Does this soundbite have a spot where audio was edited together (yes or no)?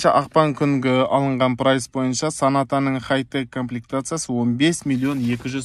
no